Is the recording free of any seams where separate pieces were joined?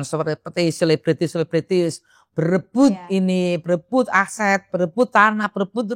yes; 0 cuts

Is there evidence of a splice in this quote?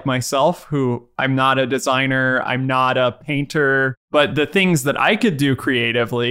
yes; 2 cuts; at 1.1 s, 4.3 s

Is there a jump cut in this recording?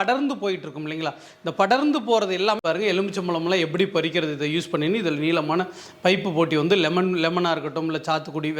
yes; 1 cut; at 2.6 s

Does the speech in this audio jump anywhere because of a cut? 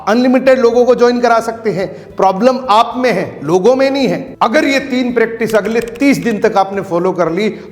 yes; 1 cut; at 4.3 s

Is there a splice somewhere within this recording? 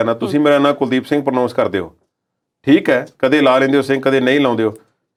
no; 0 cuts

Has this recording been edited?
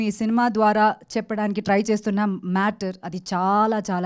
no; 0 cuts

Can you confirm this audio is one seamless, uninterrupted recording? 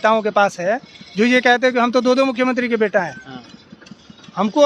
yes; 0 cuts

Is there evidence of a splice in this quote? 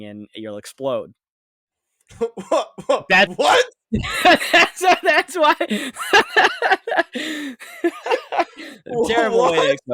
no; 0 cuts

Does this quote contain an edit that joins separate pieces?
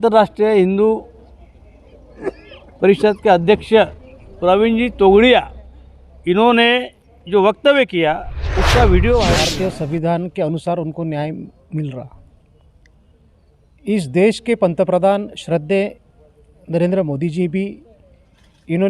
yes; 1 cut; at 9.5 s

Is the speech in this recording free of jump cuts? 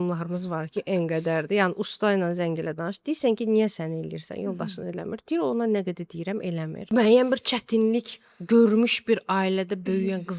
no; 1 cut; at 6.9 s

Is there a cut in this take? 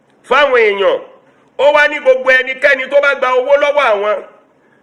no; 0 cuts

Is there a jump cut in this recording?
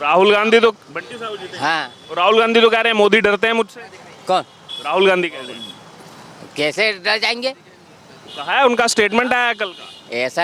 no; 0 cuts

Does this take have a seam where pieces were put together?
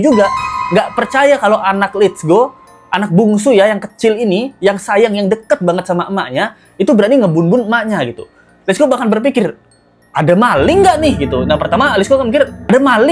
no; 0 cuts

